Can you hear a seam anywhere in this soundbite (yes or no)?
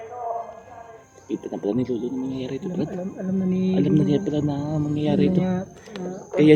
no